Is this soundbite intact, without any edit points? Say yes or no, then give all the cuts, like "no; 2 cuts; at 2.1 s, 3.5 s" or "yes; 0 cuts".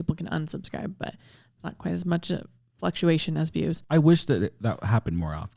yes; 0 cuts